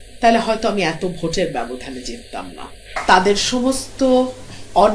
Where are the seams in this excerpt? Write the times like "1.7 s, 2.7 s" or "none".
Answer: 2.9 s